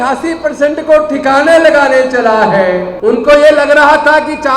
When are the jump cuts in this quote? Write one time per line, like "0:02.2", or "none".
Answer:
0:02.9